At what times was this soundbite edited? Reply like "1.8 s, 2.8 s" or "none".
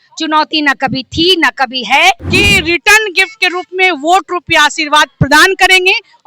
2.3 s